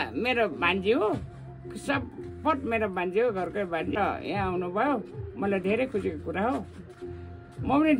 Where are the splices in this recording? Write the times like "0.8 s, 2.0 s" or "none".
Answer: 3.9 s